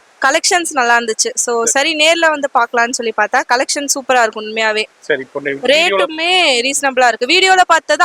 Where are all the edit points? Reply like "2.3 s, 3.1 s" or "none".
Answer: none